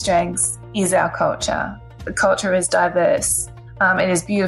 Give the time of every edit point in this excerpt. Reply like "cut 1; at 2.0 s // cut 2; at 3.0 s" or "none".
cut 1; at 2.0 s